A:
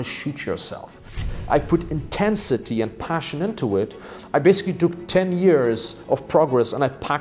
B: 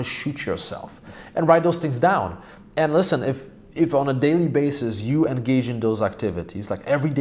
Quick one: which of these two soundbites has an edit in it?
A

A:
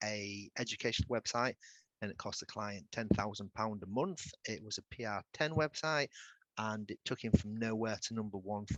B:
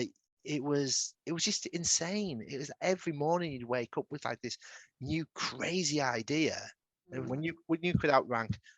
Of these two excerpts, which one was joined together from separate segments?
B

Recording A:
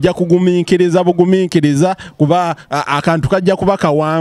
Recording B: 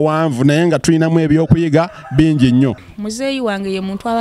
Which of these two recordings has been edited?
B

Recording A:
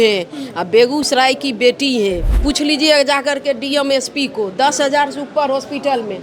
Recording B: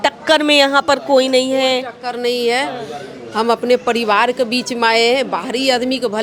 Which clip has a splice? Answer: A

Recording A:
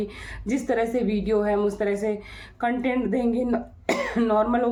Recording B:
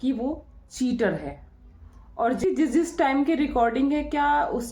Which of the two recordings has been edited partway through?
B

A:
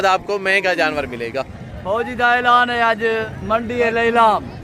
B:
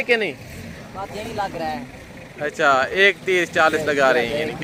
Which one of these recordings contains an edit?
A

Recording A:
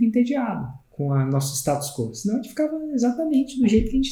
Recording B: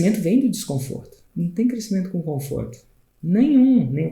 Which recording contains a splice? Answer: B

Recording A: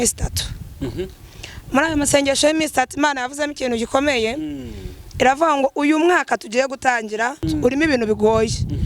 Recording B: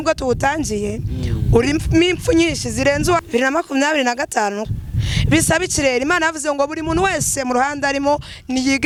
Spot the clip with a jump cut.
A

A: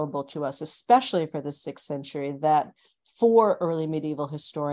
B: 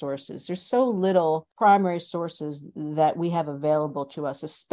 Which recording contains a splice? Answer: B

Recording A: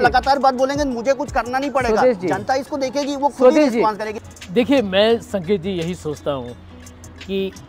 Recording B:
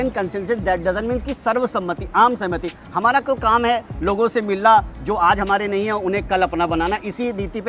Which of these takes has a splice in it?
A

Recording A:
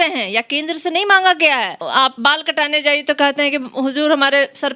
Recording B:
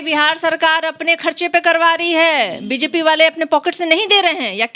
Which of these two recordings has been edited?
A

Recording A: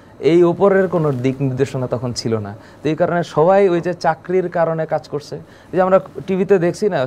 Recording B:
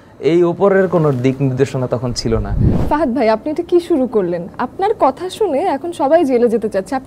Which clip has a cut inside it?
B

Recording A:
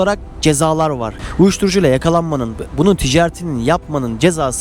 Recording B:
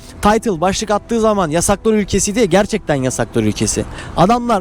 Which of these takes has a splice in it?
A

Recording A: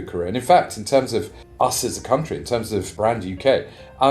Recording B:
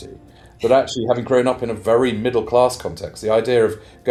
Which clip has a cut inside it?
A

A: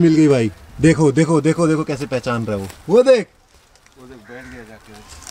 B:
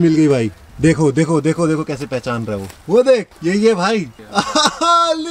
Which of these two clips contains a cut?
B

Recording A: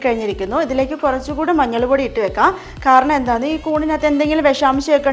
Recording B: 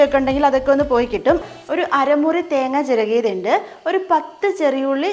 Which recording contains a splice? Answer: B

